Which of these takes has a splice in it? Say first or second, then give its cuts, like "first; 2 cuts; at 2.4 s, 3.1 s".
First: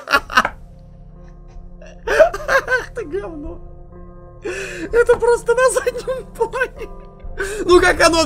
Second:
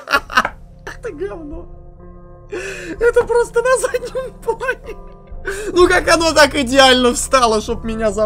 second; 1 cut; at 1.0 s